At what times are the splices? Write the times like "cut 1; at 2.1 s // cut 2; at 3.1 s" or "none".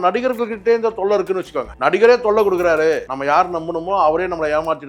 cut 1; at 1.6 s // cut 2; at 3.1 s

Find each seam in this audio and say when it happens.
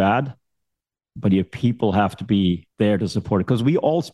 cut 1; at 2.7 s

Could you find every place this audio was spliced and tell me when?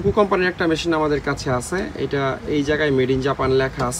none

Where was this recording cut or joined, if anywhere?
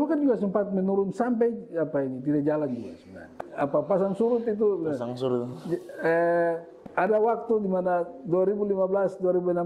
cut 1; at 3.4 s // cut 2; at 7.1 s

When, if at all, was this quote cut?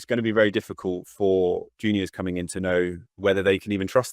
cut 1; at 3.0 s

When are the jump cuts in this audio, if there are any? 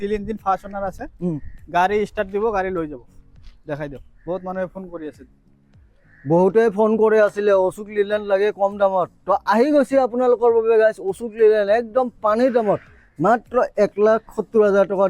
none

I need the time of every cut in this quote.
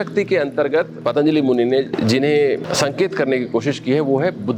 cut 1; at 0.9 s // cut 2; at 1.9 s // cut 3; at 2.6 s

